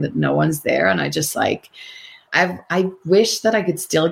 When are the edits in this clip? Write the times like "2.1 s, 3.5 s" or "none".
2.2 s